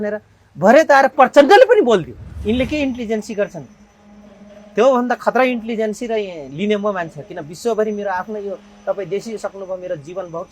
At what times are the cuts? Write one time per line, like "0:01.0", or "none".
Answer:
0:02.2